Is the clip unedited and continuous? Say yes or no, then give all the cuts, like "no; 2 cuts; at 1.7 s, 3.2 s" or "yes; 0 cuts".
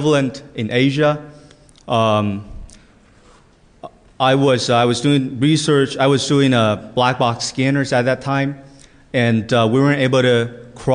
yes; 0 cuts